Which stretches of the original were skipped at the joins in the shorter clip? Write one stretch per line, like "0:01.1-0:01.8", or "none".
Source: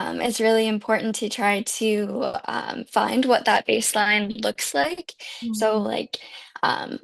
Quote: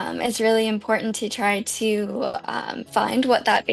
none